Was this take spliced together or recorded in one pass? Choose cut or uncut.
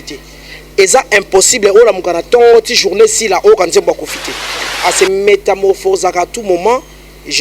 cut